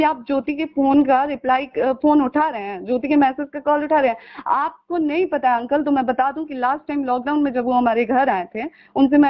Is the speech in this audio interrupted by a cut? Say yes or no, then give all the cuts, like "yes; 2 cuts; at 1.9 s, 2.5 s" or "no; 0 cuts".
no; 0 cuts